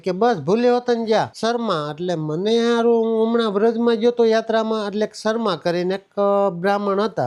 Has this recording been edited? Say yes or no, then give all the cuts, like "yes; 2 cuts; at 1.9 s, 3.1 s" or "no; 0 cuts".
no; 0 cuts